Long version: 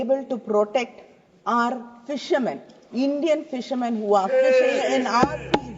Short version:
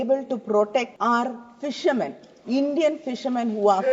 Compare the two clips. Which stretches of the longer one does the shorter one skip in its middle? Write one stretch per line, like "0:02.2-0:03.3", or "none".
0:00.9-0:01.4